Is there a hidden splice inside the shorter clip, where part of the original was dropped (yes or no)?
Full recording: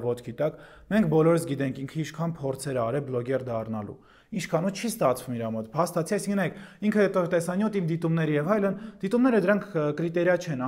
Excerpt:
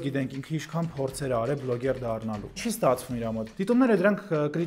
yes